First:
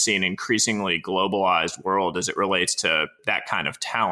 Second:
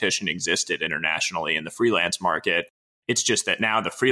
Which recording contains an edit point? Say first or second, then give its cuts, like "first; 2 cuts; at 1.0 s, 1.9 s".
first; 1 cut; at 3.2 s